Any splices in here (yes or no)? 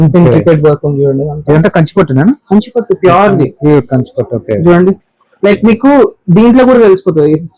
no